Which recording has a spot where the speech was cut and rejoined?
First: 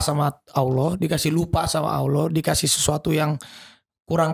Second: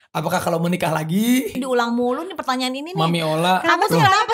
second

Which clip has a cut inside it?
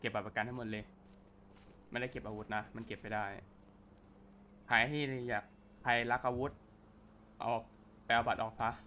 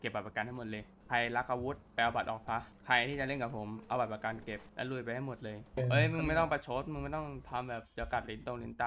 second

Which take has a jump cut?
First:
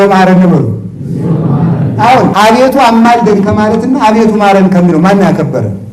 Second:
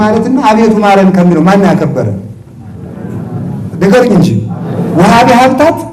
first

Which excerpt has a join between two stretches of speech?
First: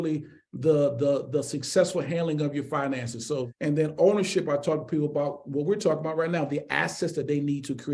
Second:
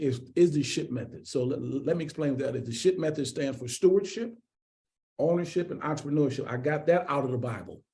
first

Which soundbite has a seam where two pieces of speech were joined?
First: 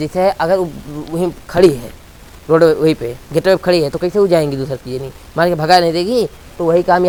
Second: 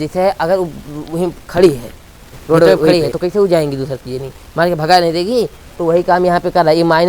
second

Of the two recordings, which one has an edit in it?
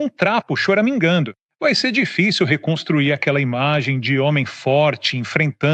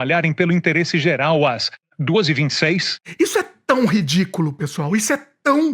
second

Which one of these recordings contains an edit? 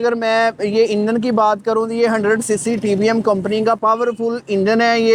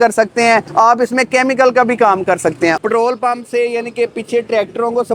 second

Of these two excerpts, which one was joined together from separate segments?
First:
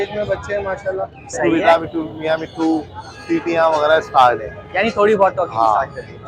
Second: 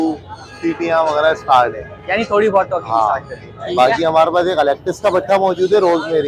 first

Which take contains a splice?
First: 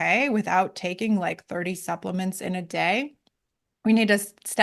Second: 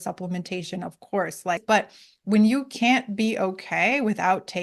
second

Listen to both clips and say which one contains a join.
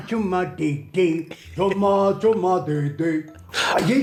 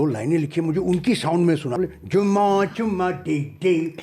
second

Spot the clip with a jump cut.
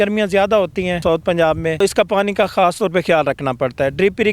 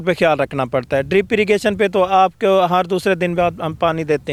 first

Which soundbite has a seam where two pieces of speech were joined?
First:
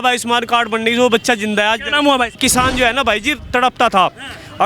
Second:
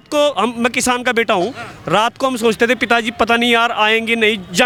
first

